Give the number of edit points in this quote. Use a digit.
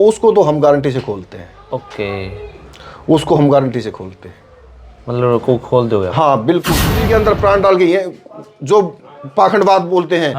1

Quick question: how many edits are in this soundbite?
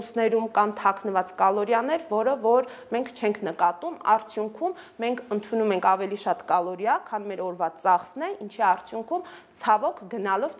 0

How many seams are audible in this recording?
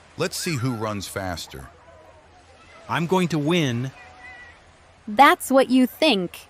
0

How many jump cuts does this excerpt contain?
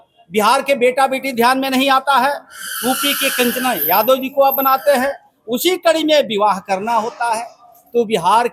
0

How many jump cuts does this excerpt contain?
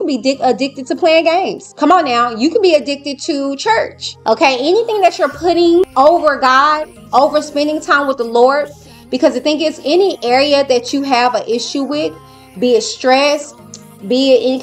3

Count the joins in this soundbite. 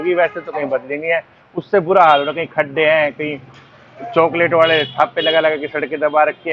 0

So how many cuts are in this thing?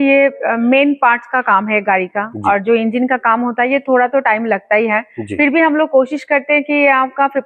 0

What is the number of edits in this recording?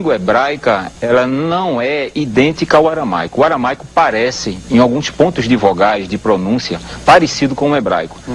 1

